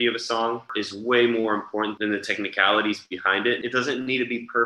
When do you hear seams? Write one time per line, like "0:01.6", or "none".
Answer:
0:03.6